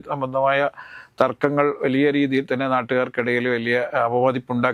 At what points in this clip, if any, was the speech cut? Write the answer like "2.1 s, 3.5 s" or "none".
none